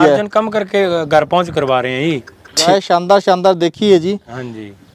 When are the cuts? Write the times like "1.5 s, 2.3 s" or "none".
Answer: 2.7 s